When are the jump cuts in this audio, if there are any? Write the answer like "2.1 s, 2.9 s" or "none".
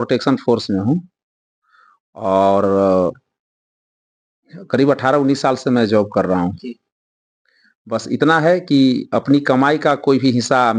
none